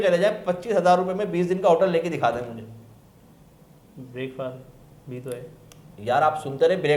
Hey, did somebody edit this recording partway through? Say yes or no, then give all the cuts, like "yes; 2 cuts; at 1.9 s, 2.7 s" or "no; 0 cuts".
no; 0 cuts